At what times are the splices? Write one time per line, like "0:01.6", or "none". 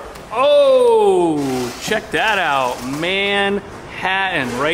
none